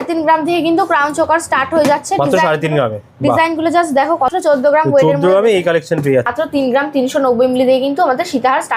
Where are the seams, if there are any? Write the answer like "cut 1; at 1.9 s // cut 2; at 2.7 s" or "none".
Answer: cut 1; at 4.3 s // cut 2; at 6.3 s

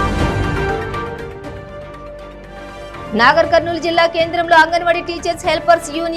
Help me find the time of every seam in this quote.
none

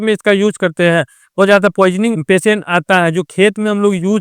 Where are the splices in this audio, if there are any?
cut 1; at 1.4 s // cut 2; at 2.2 s

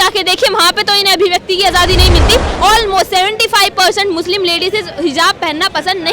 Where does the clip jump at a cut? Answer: cut 1; at 2.5 s

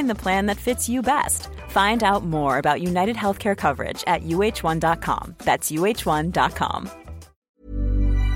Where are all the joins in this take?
cut 1; at 7.5 s

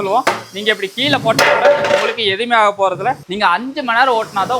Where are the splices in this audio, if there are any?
cut 1; at 3.3 s

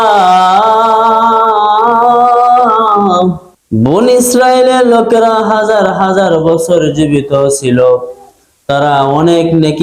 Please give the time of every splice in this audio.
cut 1; at 3.5 s

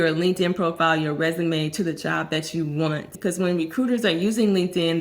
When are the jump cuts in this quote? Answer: cut 1; at 3.1 s

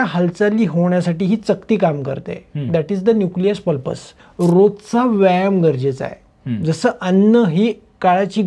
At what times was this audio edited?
cut 1; at 4.2 s

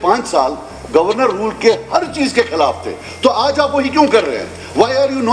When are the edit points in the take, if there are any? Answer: none

